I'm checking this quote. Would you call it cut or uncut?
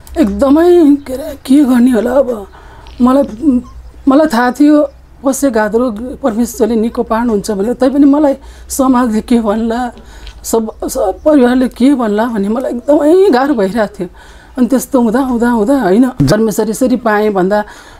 cut